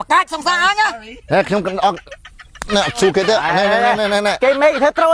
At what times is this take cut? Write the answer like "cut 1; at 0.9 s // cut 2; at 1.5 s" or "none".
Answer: none